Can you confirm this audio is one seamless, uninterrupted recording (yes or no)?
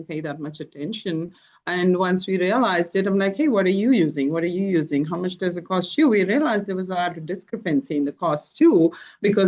yes